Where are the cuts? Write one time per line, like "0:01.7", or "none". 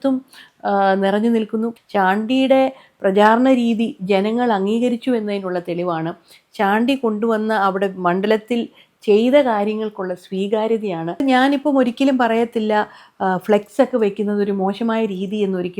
0:01.7
0:11.2